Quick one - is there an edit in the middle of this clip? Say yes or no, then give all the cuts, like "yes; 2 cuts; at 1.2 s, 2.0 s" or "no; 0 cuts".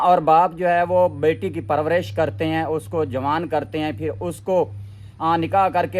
no; 0 cuts